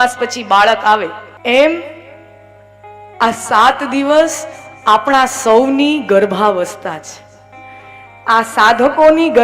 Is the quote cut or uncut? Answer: cut